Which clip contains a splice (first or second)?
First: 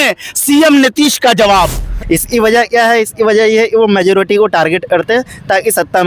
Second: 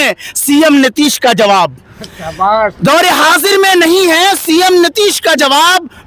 first